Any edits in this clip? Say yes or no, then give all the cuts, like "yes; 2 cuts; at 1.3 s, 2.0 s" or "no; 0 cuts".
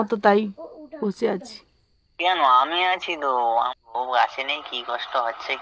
yes; 1 cut; at 3.7 s